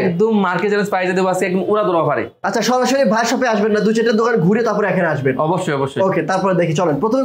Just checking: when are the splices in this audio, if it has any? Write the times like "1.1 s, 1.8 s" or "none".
none